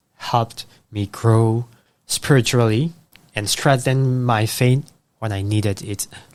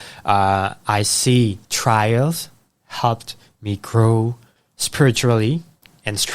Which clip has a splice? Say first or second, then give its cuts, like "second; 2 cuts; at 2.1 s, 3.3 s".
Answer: second; 1 cut; at 1.7 s